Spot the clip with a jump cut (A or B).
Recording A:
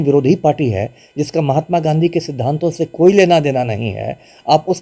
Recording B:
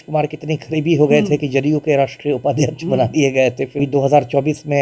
B